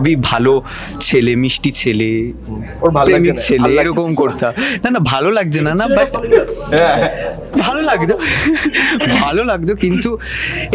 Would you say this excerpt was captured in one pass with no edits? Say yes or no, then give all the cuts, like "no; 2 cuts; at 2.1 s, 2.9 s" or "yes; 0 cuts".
yes; 0 cuts